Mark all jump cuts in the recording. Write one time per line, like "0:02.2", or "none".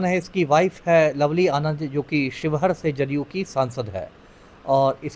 none